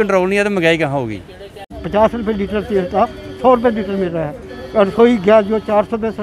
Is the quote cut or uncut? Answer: cut